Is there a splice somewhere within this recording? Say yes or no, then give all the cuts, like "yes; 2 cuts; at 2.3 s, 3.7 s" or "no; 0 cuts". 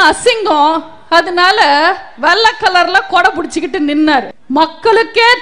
yes; 1 cut; at 4.4 s